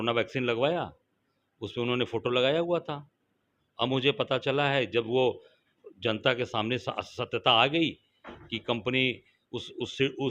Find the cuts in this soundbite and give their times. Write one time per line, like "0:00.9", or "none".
none